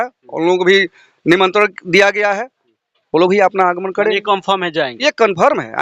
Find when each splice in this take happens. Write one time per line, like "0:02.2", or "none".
none